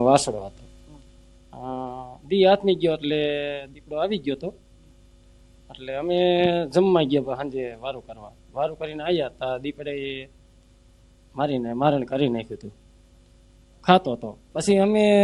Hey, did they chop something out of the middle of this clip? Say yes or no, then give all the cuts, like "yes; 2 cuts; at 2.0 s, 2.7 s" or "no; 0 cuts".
no; 0 cuts